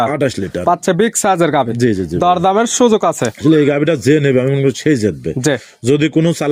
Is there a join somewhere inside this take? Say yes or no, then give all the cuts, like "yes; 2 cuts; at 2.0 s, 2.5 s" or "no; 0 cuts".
no; 0 cuts